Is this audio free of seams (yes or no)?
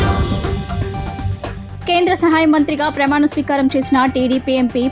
no